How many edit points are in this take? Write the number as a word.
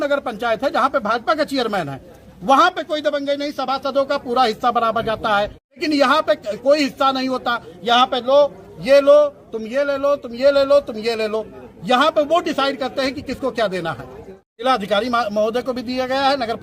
two